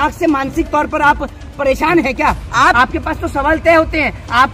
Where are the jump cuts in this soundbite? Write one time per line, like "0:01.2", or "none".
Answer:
0:02.6